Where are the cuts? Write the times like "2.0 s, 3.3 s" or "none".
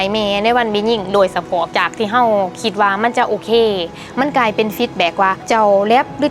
1.7 s, 5.4 s